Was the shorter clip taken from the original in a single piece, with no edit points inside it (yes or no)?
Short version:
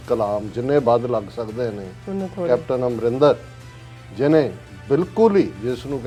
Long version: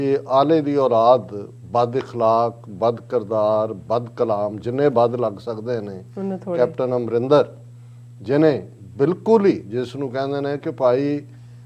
yes